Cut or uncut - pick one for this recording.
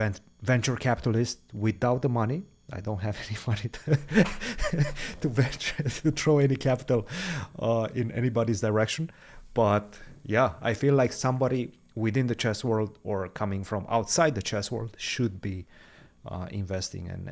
uncut